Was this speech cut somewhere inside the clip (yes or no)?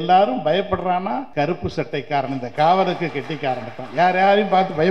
yes